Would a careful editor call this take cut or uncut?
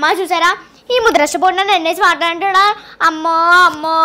uncut